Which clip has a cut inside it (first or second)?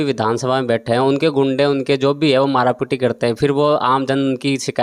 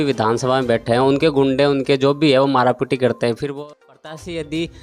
second